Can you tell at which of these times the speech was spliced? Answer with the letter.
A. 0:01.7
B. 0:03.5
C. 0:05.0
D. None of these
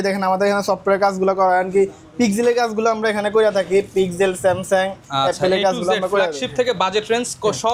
D